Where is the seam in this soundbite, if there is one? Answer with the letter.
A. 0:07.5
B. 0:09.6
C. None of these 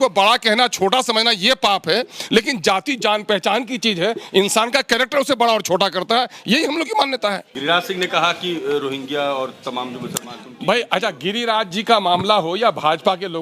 A